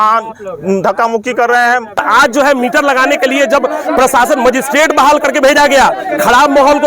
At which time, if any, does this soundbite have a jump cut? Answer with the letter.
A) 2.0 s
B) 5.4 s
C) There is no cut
A